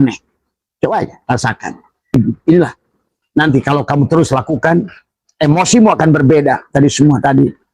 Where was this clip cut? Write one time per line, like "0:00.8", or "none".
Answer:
0:02.2